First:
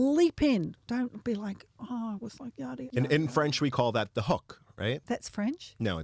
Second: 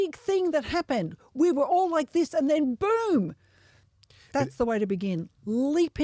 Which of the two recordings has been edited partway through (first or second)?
first